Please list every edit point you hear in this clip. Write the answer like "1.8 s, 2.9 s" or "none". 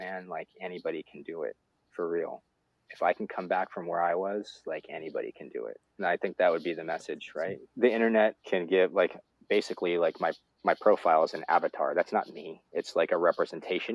5.8 s, 7.6 s, 8.4 s